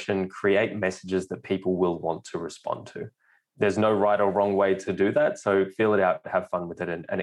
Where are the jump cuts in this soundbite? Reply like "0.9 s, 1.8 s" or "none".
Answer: 3.8 s, 4.8 s

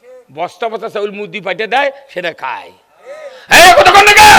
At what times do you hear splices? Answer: none

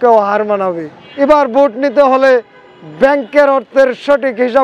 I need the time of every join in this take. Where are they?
1.0 s

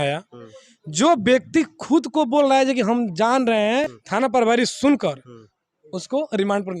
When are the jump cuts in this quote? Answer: 4.0 s

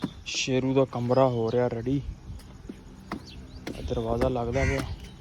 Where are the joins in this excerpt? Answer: none

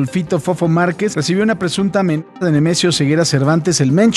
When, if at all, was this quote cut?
1.1 s

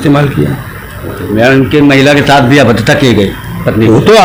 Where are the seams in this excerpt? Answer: none

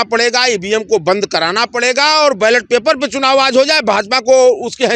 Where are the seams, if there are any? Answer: none

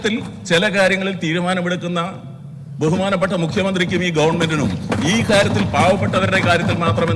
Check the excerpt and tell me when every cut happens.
none

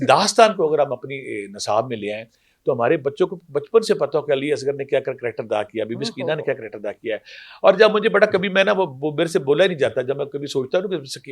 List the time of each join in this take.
none

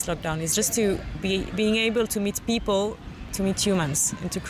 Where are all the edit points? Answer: 3.1 s

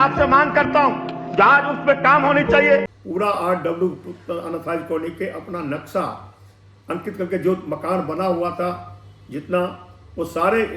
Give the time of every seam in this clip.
2.9 s

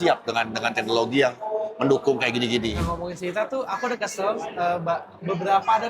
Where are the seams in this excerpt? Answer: 2.8 s

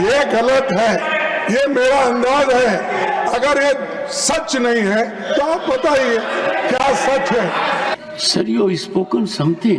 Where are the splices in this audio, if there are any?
8.0 s

